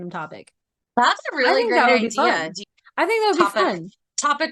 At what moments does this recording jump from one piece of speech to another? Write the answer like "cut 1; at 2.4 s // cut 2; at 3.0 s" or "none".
cut 1; at 2.6 s